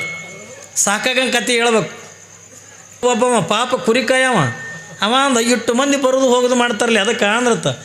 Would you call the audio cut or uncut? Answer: cut